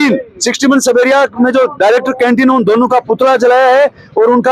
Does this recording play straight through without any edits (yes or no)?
yes